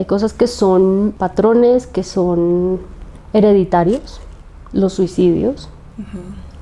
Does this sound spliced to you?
yes; 1 cut; at 1.2 s

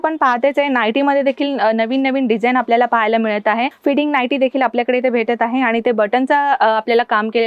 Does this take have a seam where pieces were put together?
yes; 1 cut; at 3.7 s

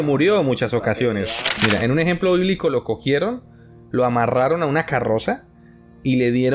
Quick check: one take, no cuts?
no; 1 cut; at 1.5 s

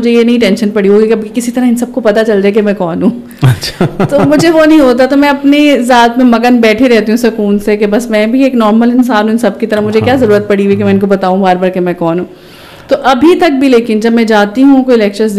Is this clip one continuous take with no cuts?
yes; 0 cuts

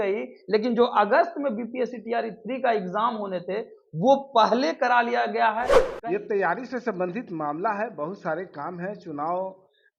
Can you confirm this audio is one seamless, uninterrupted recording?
no; 1 cut; at 5.8 s

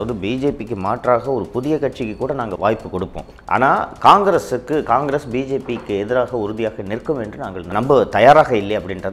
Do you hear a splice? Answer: yes; 2 cuts; at 2.5 s, 7.7 s

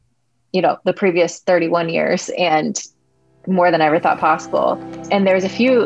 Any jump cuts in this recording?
yes; 1 cut; at 4.9 s

